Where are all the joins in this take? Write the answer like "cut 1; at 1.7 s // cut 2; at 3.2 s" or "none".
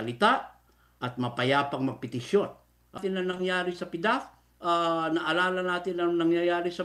cut 1; at 3.0 s